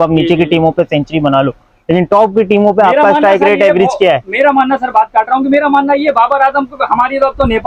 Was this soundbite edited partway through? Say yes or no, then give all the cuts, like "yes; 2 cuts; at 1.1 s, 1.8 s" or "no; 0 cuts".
no; 0 cuts